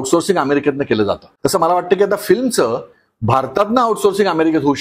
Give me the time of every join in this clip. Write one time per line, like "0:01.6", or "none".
0:01.3